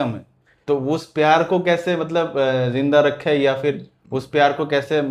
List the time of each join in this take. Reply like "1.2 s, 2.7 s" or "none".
none

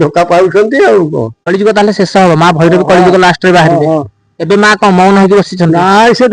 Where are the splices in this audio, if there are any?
1.4 s

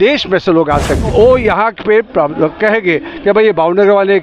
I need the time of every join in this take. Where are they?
1.1 s

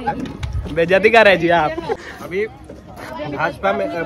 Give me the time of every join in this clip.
2.0 s

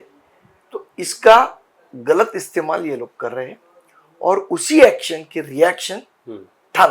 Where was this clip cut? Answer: none

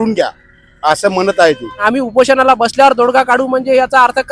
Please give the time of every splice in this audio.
1.8 s

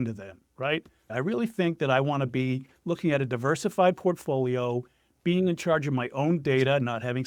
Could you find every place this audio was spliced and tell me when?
1.1 s

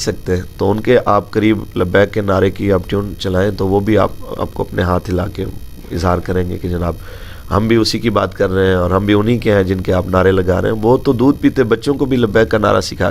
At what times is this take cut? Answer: none

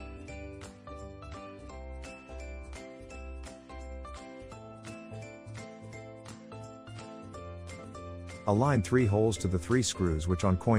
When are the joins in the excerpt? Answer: 8.0 s

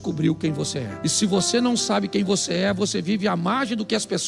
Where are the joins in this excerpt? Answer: none

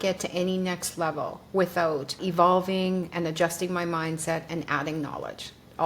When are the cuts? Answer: 2.2 s

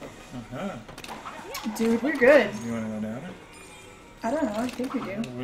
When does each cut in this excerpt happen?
none

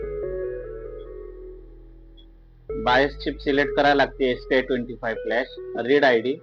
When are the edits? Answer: none

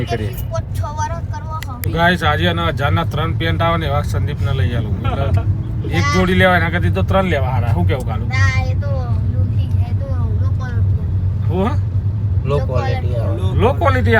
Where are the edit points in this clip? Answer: 1.8 s

